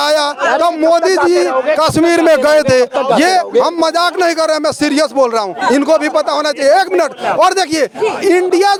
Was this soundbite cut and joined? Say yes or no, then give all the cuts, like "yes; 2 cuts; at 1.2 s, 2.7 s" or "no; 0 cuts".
no; 0 cuts